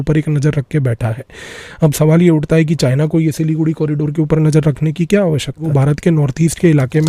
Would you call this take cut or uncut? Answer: cut